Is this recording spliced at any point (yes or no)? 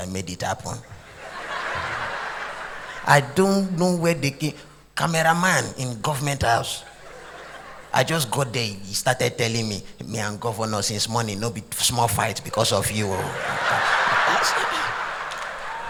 no